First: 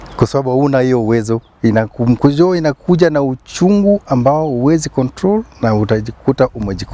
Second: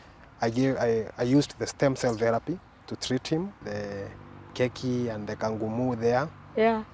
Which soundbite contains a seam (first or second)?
second